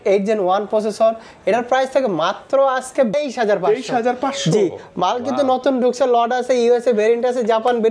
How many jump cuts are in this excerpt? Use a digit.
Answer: 1